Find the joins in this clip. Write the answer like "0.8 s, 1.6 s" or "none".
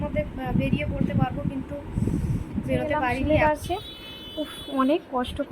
3.2 s